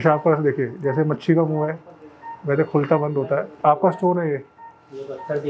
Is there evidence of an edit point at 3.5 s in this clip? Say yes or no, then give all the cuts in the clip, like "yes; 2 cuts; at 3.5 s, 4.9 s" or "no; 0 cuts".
yes; 1 cut; at 3.5 s